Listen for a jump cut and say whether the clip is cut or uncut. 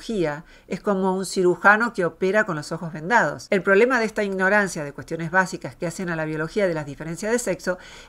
cut